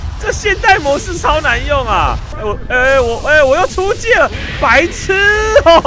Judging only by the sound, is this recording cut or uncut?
cut